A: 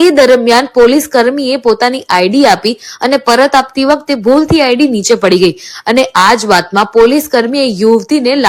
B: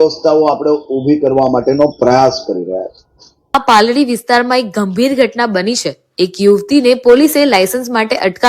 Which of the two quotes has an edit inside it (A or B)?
B